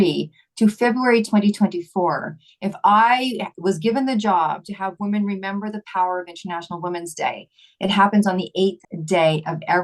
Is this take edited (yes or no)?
yes